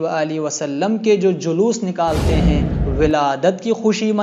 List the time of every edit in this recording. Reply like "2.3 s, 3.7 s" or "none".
2.8 s